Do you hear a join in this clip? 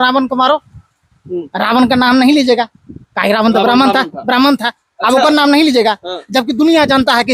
no; 0 cuts

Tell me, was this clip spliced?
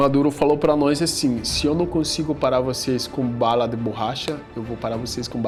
no; 0 cuts

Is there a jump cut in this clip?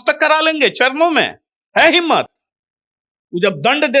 no; 0 cuts

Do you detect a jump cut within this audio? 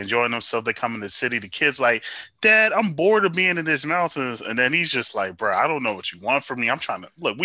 no; 0 cuts

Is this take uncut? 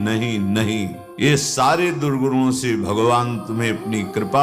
no; 1 cut; at 1.2 s

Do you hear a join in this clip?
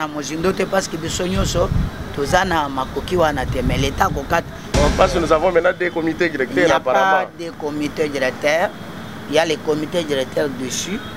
yes; 1 cut; at 4.7 s

